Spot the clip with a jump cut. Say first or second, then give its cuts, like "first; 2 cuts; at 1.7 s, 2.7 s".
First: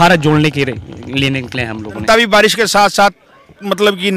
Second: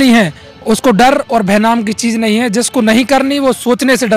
first; 1 cut; at 2.0 s